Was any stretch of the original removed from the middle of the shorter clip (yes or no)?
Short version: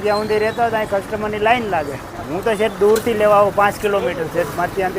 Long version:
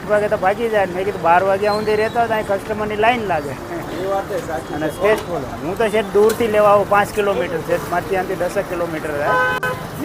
yes